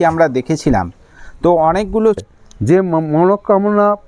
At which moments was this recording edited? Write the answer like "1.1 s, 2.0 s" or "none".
2.2 s